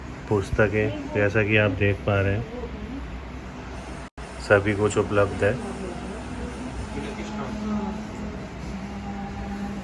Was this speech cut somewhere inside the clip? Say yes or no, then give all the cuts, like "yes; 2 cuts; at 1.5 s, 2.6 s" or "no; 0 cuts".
no; 0 cuts